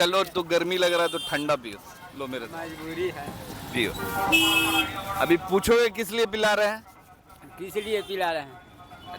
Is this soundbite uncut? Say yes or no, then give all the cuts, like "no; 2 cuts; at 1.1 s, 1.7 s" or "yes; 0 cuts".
yes; 0 cuts